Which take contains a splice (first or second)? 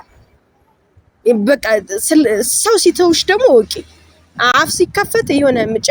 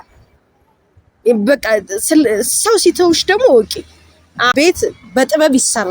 second